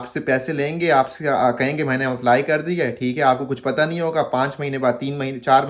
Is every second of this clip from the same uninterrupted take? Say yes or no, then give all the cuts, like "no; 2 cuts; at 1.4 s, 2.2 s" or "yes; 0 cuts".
yes; 0 cuts